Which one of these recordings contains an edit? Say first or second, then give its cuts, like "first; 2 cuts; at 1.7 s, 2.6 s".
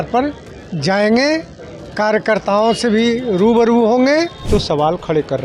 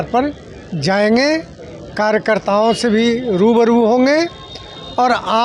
first; 1 cut; at 4.4 s